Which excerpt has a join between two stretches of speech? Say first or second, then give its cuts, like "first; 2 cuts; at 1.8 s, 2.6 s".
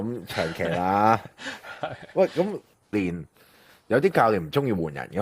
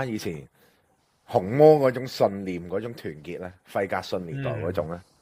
first; 1 cut; at 2.9 s